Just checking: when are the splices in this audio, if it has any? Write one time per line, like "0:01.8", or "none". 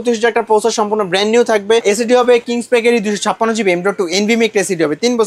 0:01.8